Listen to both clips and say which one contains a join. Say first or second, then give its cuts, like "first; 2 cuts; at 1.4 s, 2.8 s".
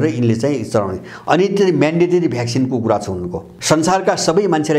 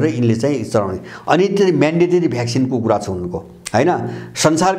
first; 1 cut; at 3.5 s